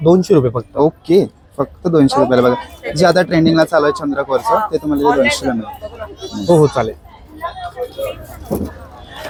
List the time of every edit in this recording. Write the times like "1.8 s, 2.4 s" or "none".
none